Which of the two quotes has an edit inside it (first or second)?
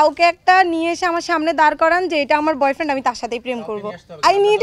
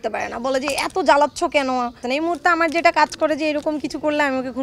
second